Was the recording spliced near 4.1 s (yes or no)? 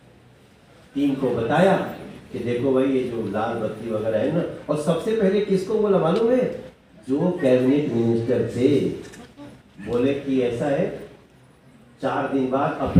no